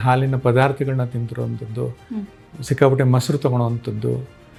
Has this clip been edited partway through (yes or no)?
no